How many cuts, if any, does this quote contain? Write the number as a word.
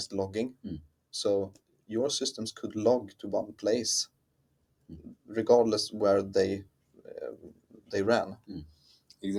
zero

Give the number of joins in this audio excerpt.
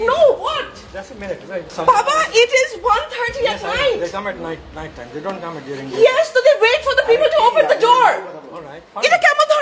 one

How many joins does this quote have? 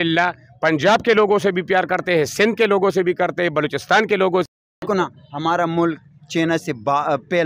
one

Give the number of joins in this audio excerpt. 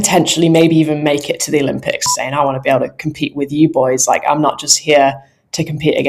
one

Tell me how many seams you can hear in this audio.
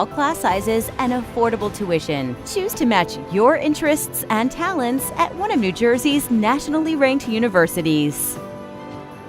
one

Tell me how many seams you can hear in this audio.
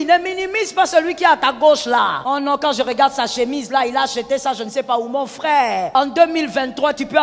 two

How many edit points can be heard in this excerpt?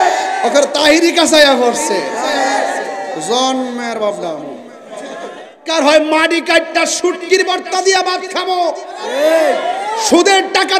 one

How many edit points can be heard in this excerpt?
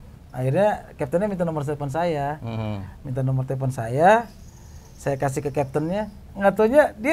zero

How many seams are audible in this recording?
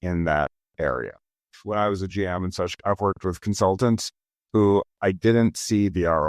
two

